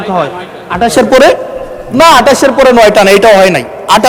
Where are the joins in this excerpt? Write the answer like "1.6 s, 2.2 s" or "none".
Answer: none